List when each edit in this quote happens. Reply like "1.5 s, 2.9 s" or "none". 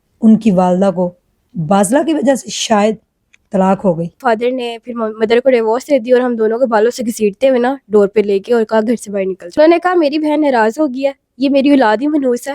4.2 s, 9.5 s